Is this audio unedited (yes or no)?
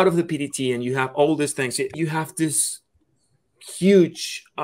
no